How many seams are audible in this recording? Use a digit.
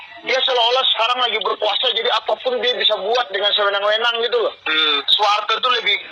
1